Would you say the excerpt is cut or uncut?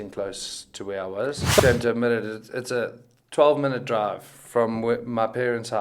cut